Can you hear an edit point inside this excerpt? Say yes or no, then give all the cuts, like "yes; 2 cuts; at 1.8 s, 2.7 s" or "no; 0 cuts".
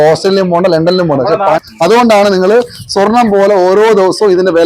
yes; 1 cut; at 1.6 s